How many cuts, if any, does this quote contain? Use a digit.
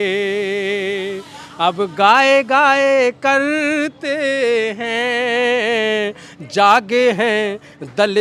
0